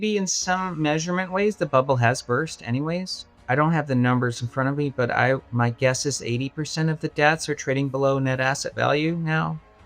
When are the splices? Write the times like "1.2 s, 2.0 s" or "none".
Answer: 3.3 s